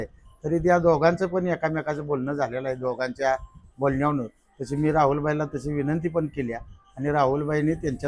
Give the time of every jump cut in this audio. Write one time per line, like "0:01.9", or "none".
none